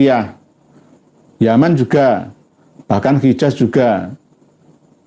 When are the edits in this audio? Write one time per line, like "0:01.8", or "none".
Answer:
none